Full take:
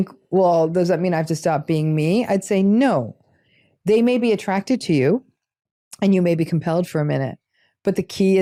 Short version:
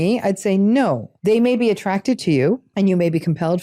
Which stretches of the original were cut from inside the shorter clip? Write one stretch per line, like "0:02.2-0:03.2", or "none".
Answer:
0:03.1-0:03.7
0:05.3-0:05.9